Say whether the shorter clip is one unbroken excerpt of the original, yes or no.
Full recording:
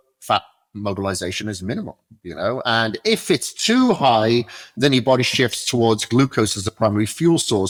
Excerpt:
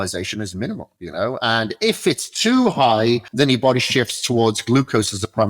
no